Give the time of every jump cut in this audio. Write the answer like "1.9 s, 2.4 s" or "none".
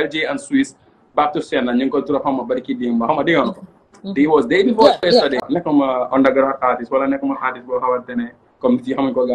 5.4 s